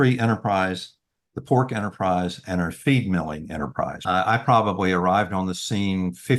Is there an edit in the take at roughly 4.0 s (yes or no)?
yes